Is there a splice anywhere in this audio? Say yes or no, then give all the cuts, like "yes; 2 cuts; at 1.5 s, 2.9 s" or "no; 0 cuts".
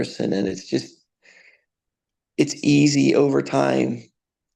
no; 0 cuts